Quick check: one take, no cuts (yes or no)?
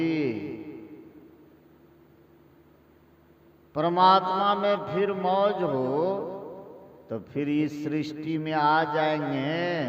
yes